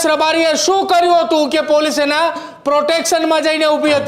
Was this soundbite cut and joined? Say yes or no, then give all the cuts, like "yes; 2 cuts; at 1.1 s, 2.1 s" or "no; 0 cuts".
no; 0 cuts